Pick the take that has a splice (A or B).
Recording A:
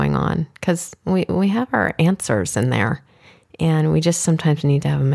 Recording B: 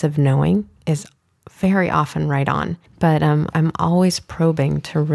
B